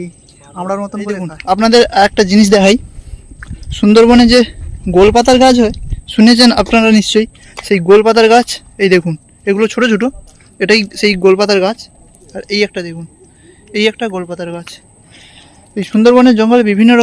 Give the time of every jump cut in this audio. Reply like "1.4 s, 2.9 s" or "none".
1.4 s